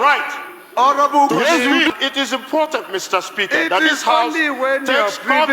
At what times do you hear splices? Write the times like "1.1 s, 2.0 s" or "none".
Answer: 1.9 s